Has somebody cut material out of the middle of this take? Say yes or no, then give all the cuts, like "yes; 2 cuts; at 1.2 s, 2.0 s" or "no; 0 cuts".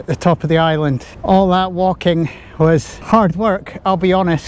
yes; 2 cuts; at 1.1 s, 2.9 s